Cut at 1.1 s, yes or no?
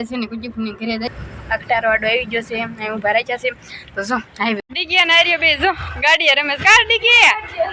yes